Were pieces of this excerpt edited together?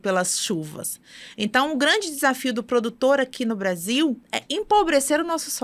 yes; 1 cut; at 4.3 s

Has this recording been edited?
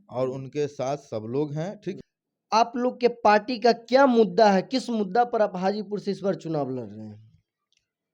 yes; 1 cut; at 2.0 s

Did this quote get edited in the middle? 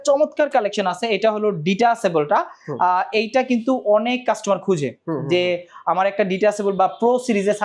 no; 0 cuts

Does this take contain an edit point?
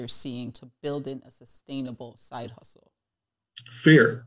no; 0 cuts

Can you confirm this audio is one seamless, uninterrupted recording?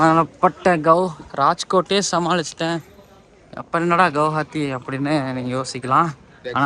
yes; 0 cuts

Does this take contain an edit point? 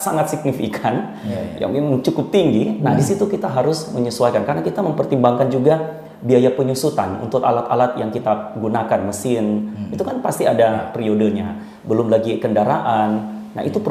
no; 0 cuts

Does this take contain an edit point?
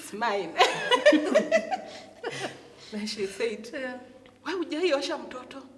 no; 0 cuts

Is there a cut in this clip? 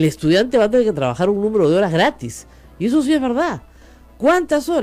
no; 0 cuts

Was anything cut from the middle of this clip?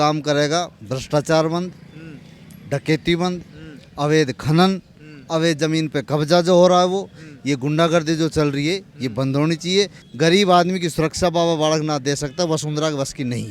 yes; 1 cut; at 10.0 s

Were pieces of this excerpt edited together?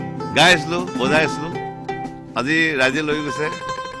no; 0 cuts

